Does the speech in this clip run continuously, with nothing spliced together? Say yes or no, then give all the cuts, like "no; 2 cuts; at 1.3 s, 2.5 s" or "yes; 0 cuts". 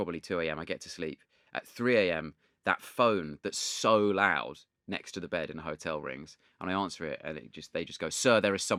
yes; 0 cuts